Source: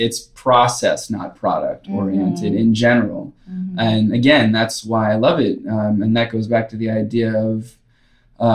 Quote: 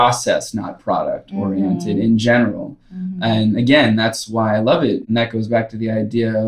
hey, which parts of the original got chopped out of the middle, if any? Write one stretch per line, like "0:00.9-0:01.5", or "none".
0:05.6-0:06.1